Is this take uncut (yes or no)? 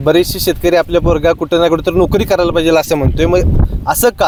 yes